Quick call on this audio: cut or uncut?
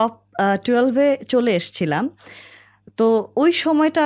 uncut